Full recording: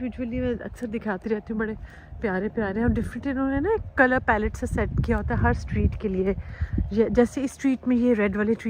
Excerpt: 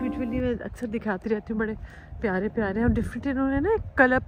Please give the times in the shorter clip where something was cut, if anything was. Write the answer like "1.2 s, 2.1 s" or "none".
none